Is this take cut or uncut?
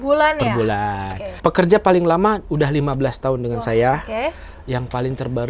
cut